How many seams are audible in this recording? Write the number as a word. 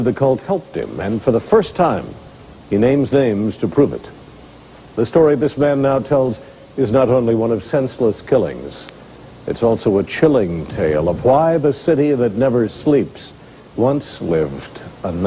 one